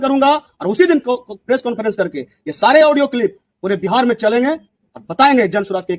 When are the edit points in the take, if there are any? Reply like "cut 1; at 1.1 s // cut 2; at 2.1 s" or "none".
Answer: none